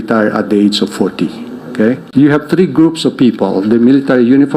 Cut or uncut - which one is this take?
cut